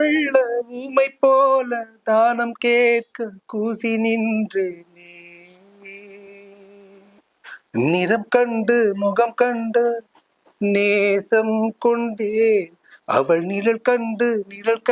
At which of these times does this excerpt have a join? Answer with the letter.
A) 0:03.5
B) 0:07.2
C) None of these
B